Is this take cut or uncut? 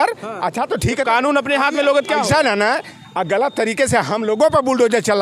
uncut